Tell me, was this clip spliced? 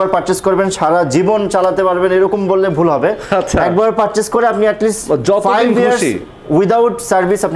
no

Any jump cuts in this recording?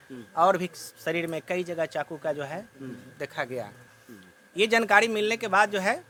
no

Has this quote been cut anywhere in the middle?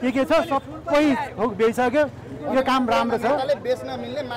no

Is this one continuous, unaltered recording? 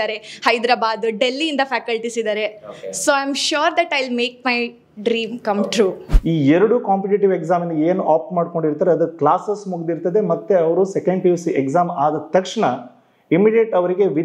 no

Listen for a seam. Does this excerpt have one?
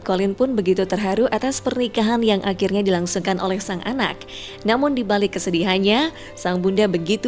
no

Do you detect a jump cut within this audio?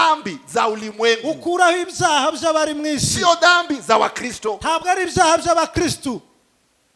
no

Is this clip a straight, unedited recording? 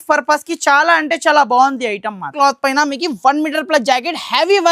no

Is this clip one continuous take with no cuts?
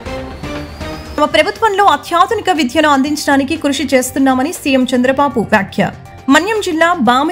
no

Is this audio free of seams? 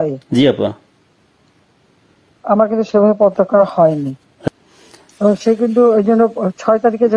no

